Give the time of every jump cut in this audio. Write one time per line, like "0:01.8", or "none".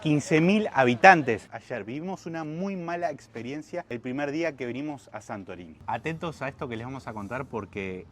0:01.5